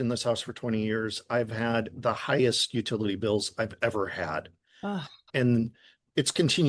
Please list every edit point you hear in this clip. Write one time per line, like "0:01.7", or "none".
0:05.2